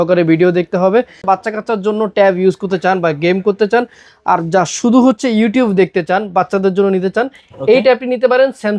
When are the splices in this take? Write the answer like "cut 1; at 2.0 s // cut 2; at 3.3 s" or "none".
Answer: cut 1; at 1.3 s